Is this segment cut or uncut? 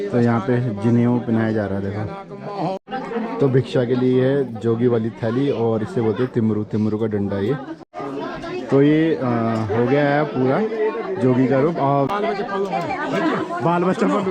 cut